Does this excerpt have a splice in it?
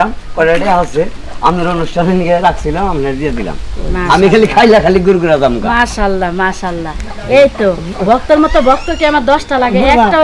no; 0 cuts

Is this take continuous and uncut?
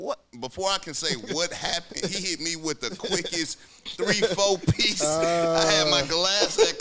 yes; 0 cuts

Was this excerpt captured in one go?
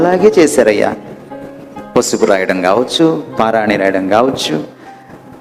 yes; 0 cuts

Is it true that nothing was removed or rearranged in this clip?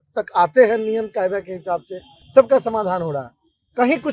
yes; 0 cuts

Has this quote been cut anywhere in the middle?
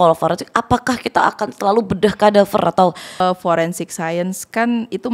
yes; 1 cut; at 3.2 s

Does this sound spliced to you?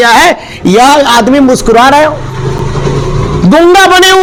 no; 0 cuts

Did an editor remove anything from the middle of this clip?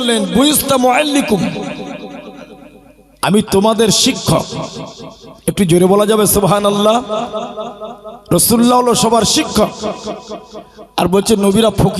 no; 0 cuts

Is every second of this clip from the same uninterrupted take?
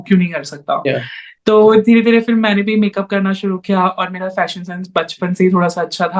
yes; 0 cuts

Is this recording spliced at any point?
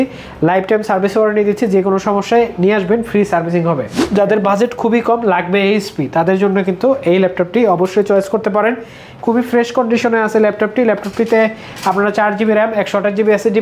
yes; 1 cut; at 3.9 s

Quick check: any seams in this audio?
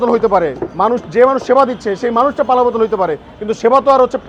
no; 0 cuts

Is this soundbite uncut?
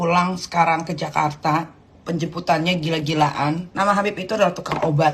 yes; 0 cuts

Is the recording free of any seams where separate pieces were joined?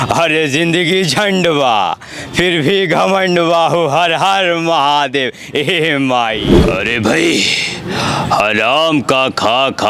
no; 1 cut; at 6.5 s

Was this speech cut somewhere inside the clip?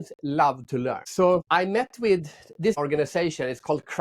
yes; 1 cut; at 1.4 s

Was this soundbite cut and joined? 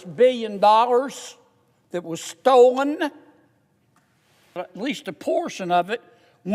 yes; 1 cut; at 4.6 s

